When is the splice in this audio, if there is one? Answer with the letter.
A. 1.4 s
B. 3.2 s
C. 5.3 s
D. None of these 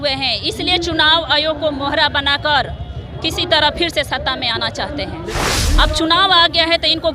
C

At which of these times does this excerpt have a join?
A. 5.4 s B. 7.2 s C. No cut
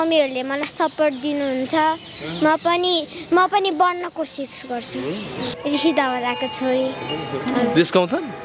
A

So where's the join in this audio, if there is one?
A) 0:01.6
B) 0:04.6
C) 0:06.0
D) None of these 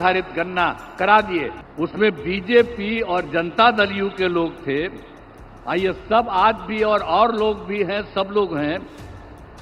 A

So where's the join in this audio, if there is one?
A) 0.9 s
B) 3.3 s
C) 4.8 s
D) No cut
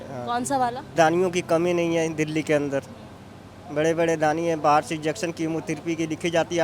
A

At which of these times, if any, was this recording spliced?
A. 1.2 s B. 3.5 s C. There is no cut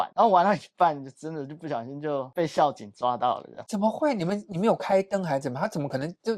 C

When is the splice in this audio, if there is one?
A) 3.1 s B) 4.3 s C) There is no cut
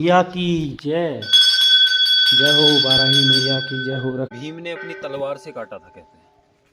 B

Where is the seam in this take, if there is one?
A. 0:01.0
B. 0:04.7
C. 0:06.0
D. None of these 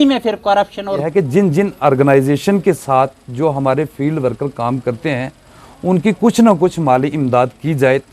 A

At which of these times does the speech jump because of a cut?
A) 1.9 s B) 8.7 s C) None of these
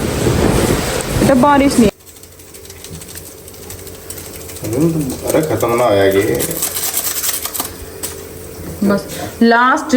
A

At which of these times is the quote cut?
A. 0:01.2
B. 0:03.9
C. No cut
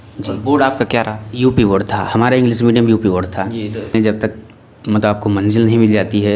B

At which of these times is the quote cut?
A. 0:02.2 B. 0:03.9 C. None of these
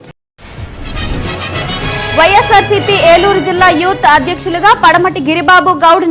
C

